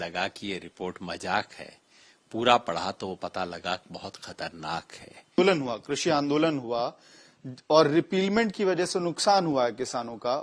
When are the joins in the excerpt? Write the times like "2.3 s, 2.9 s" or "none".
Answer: 5.4 s